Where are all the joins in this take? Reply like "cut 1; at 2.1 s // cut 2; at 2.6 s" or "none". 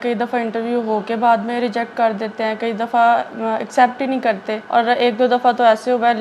cut 1; at 4.5 s